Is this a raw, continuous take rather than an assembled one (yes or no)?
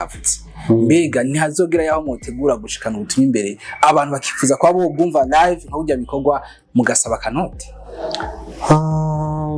yes